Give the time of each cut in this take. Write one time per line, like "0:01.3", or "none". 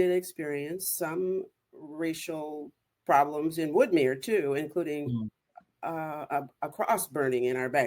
none

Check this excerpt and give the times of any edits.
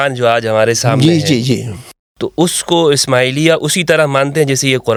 none

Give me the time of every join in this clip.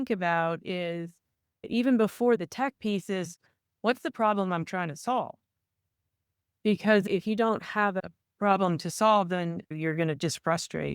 0:09.7

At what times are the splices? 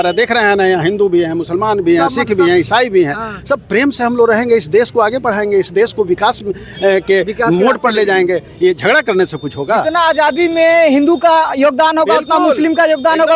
none

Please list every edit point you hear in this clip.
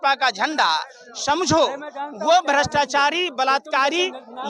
none

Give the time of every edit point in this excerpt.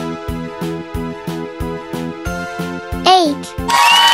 none

